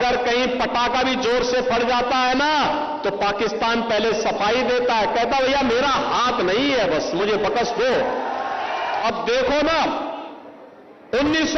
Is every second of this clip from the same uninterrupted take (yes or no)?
no